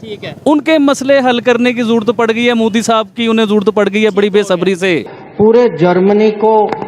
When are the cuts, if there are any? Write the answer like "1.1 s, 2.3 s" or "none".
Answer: 5.1 s